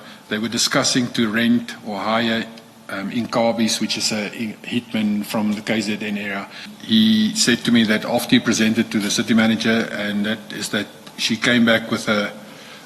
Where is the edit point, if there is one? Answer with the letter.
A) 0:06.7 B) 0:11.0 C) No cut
A